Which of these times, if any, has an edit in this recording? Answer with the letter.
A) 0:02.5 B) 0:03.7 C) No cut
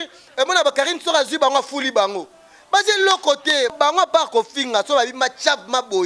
B